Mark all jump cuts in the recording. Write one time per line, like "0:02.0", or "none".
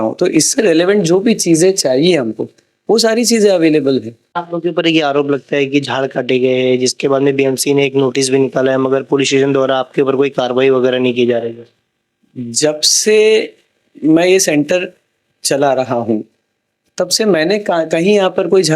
0:04.4